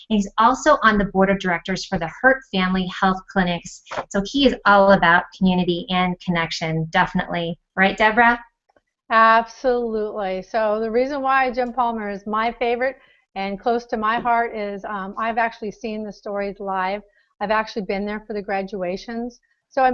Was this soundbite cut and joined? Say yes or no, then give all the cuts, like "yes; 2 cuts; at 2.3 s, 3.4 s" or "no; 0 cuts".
yes; 1 cut; at 11.6 s